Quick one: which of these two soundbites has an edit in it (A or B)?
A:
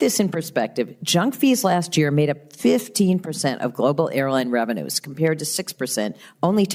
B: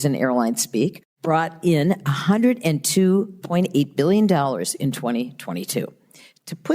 B